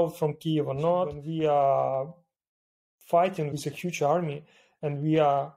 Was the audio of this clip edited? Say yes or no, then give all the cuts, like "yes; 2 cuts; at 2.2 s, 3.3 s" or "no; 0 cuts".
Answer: yes; 1 cut; at 1.2 s